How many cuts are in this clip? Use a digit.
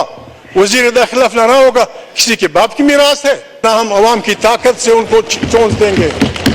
1